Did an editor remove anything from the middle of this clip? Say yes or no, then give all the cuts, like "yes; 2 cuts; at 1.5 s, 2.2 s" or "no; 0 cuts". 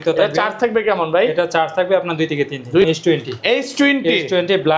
yes; 1 cut; at 2.8 s